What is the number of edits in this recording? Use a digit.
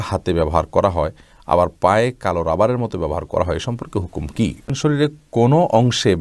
1